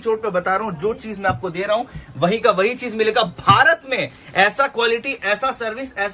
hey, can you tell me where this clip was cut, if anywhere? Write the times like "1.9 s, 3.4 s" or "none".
none